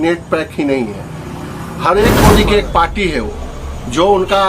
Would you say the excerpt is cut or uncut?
cut